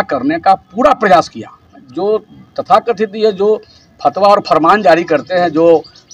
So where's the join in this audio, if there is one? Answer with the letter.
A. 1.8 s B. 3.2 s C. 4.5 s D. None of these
A